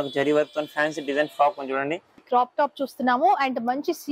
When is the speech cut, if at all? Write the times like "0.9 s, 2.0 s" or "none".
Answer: 2.2 s